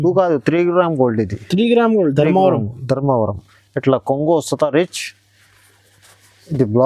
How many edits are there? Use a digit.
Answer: 0